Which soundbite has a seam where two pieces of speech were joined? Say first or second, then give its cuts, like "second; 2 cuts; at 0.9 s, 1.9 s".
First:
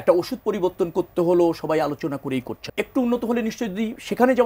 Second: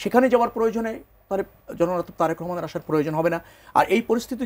first; 1 cut; at 2.6 s